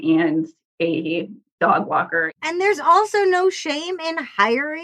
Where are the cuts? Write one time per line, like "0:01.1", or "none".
0:01.4
0:02.3